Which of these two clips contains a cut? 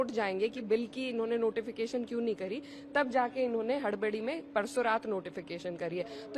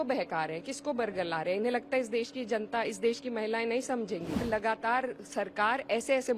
second; 1 cut; at 4.4 s

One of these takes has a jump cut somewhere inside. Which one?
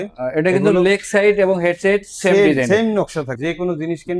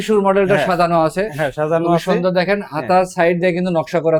first; 1 cut; at 3.2 s

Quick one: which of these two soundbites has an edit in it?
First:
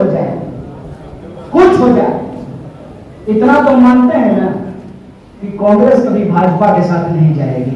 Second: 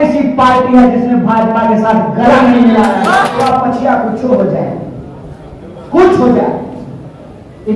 second; 1 cut; at 3.5 s

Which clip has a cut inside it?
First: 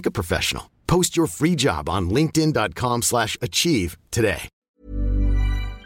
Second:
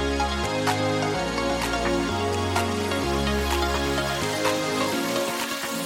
first; 1 cut; at 4.5 s

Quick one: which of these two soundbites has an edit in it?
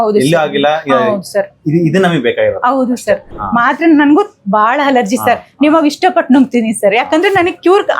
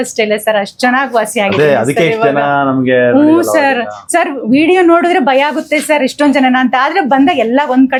first; 1 cut; at 3.3 s

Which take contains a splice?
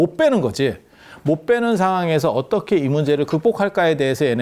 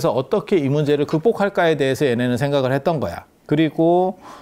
second; 1 cut; at 3.3 s

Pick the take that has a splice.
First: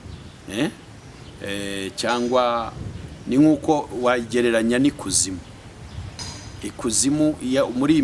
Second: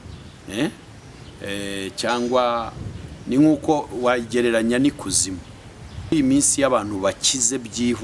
second; 1 cut; at 6.1 s

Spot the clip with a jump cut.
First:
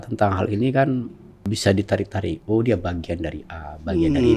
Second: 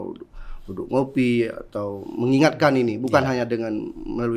first; 1 cut; at 1.5 s

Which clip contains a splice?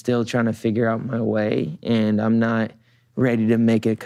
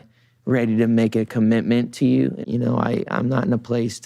second; 1 cut; at 2.4 s

